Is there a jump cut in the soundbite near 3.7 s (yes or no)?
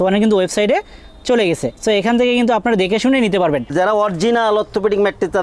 yes